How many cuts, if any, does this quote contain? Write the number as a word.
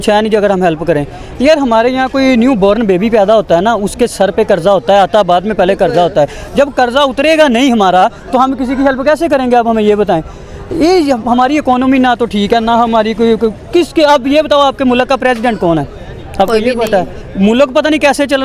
zero